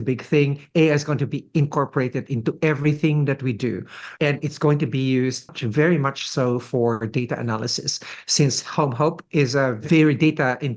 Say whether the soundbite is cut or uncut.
cut